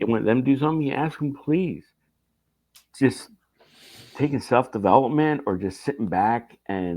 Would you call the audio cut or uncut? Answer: cut